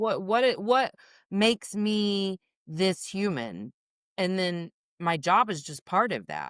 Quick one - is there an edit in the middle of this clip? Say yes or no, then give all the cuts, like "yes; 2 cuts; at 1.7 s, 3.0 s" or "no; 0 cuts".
no; 0 cuts